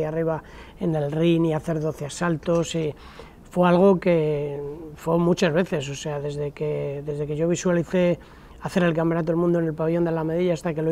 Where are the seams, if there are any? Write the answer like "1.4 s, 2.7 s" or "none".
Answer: none